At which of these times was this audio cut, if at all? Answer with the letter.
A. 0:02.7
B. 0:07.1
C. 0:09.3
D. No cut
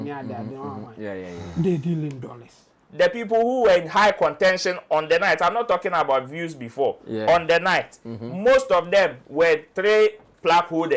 A